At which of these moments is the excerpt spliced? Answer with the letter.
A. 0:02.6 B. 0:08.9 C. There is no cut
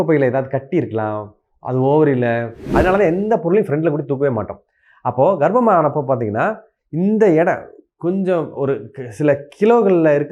A